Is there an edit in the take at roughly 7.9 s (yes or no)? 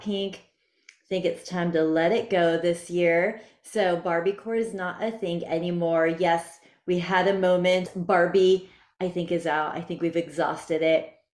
yes